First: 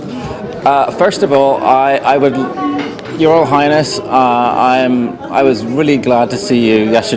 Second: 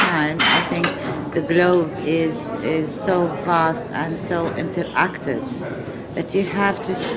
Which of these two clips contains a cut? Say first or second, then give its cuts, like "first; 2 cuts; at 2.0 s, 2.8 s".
first; 1 cut; at 5.4 s